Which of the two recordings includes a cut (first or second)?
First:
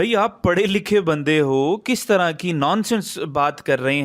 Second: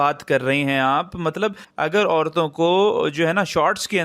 second